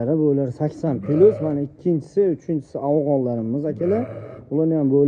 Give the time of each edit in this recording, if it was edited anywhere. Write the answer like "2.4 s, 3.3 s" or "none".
none